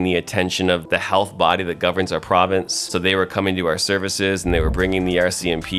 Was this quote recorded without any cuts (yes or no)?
no